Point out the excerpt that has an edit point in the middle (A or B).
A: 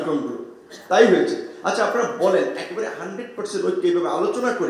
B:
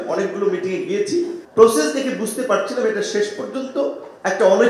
B